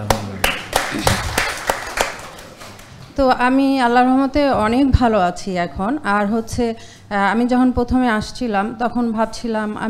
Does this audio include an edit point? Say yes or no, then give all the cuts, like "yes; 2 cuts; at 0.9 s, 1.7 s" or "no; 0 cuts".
no; 0 cuts